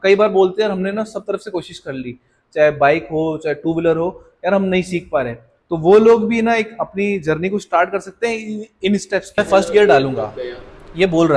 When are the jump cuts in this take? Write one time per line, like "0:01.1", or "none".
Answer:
0:09.4